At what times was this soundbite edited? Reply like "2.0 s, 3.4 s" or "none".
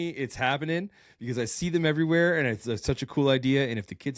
none